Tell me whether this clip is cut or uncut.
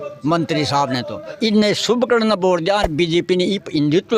cut